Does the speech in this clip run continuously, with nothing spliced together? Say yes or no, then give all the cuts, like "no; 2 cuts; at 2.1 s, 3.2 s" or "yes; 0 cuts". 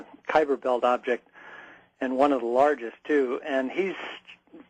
yes; 0 cuts